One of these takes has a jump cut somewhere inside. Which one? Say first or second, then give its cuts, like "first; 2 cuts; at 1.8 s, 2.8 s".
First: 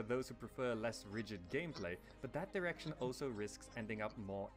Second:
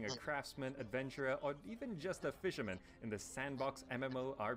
second; 1 cut; at 1.7 s